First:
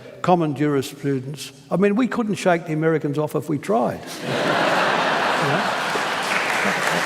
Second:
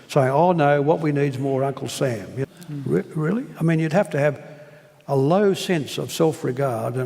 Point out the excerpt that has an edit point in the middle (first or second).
second